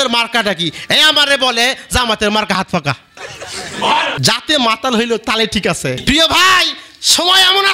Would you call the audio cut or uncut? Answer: cut